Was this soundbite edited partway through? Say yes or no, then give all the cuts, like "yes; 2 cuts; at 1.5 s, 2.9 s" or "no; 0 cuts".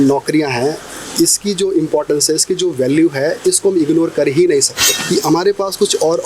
yes; 1 cut; at 4.9 s